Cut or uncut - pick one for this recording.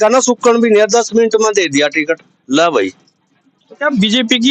uncut